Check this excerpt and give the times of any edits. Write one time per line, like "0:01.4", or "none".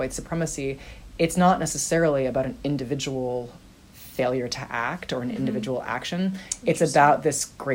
none

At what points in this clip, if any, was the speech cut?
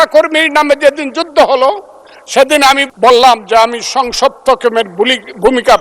0:02.9

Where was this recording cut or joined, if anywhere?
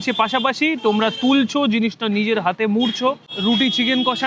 none

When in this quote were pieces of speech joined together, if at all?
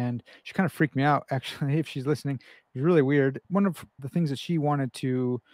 0:03.5

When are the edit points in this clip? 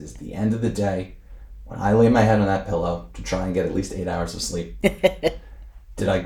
0:04.7

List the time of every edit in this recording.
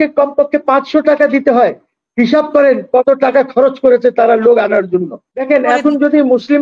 0:05.4

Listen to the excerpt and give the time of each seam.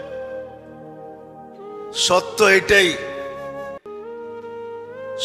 0:03.0
0:04.6

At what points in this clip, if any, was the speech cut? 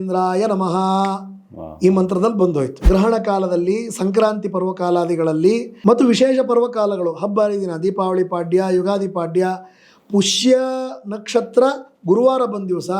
0:02.8
0:05.7

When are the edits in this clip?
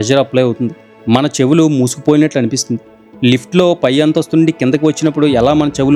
none

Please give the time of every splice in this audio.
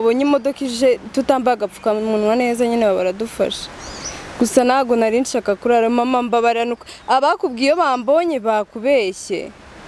none

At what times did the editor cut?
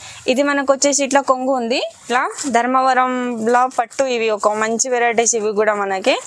0:02.1

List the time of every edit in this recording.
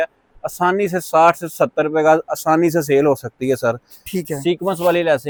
none

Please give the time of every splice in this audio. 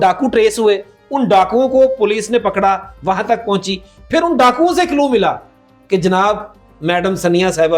none

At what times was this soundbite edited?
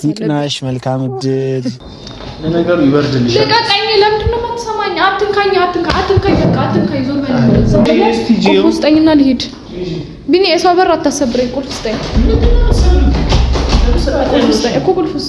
0:01.8
0:07.9

